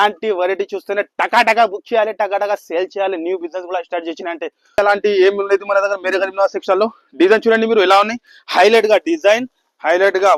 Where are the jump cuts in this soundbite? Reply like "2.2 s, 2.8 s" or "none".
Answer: 4.8 s